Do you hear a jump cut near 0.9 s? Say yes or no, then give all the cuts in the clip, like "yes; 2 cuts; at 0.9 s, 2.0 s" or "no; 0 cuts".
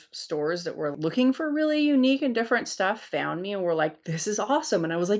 yes; 1 cut; at 0.9 s